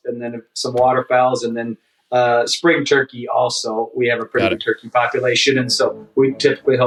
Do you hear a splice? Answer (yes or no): no